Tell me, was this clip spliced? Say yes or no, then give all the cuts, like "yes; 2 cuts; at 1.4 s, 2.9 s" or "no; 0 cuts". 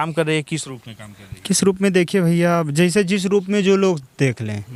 no; 0 cuts